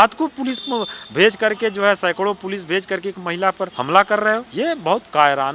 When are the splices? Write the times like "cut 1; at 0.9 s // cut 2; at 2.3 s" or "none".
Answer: cut 1; at 3.7 s // cut 2; at 4.5 s